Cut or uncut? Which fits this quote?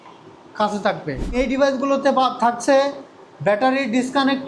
cut